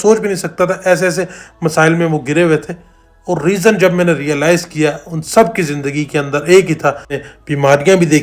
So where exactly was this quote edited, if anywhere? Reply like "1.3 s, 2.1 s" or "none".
7.2 s